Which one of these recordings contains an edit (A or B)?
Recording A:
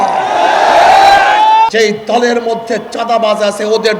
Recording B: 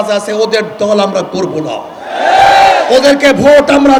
A